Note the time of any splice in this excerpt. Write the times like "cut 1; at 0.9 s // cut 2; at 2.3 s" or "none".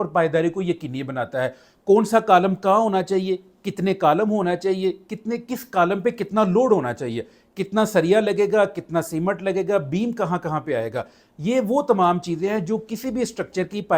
none

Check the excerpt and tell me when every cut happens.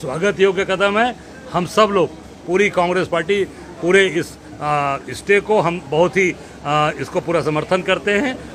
none

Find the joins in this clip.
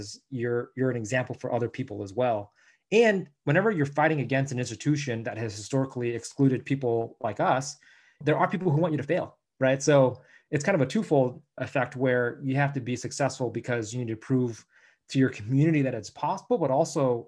cut 1; at 8.2 s

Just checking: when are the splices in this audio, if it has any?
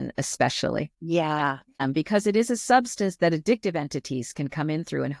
cut 1; at 1.0 s // cut 2; at 1.8 s

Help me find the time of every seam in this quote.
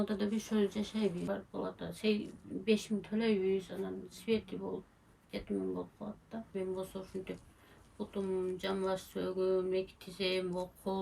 cut 1; at 1.2 s // cut 2; at 6.5 s

